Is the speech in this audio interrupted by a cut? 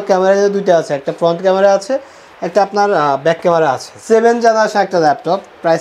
yes; 1 cut; at 3.9 s

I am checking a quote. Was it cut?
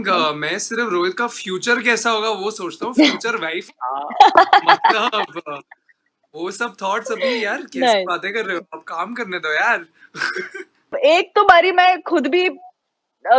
yes; 1 cut; at 10.9 s

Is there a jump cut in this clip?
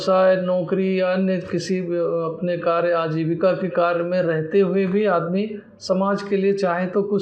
no; 0 cuts

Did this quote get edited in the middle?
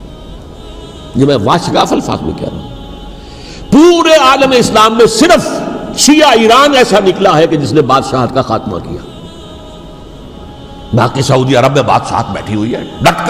no; 0 cuts

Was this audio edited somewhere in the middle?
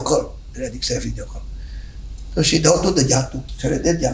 no; 0 cuts

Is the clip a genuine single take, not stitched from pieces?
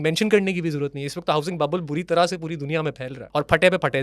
no; 1 cut; at 3.1 s

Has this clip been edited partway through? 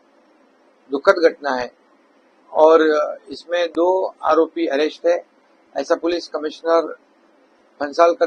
no; 0 cuts

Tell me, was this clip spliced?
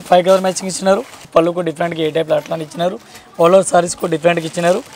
yes; 1 cut; at 1.3 s

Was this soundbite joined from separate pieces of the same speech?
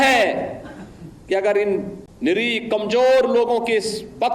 yes; 1 cut; at 2.0 s

